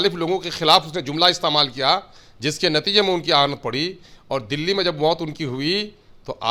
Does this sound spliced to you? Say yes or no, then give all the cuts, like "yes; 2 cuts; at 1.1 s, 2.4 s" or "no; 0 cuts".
no; 0 cuts